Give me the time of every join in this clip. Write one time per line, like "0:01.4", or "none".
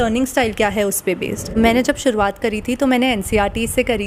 0:01.5